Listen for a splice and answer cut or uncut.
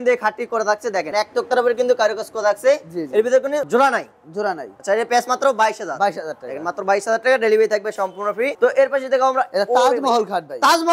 uncut